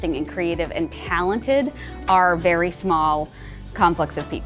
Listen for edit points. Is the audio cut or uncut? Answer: uncut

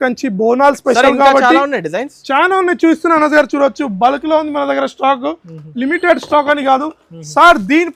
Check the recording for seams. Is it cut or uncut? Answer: uncut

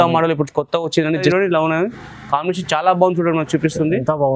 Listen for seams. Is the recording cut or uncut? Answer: cut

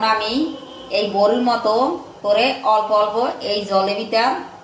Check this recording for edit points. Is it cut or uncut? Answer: uncut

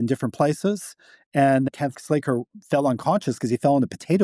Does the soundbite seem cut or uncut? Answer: cut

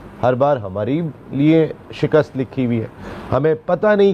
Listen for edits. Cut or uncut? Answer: cut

